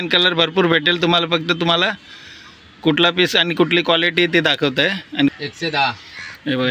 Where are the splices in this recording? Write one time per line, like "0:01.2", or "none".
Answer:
0:05.3